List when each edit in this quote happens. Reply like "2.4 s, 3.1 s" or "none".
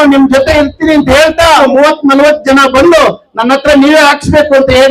1.6 s

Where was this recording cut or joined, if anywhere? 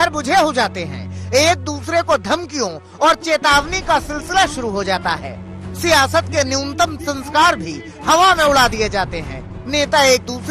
none

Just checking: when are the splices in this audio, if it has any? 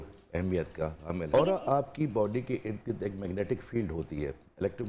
1.2 s

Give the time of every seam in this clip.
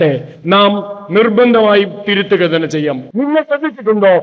3.0 s

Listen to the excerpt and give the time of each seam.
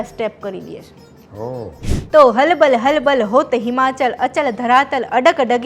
1.9 s

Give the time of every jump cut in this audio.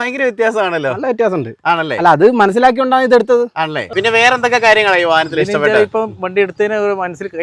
3.9 s

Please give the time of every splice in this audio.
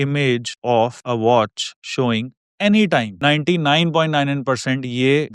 3.2 s

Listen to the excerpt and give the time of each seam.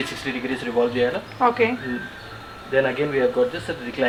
none

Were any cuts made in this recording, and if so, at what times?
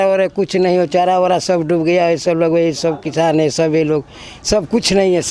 none

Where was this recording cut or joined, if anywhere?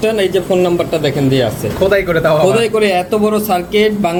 none

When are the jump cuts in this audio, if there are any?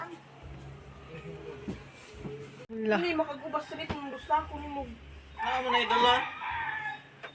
2.7 s

